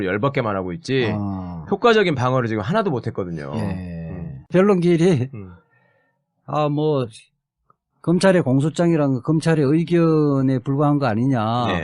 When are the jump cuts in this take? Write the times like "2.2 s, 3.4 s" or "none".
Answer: 10.0 s